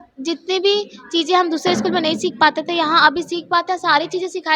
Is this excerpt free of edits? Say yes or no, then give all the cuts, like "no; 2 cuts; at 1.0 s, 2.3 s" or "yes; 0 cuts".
yes; 0 cuts